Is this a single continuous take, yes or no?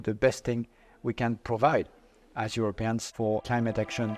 no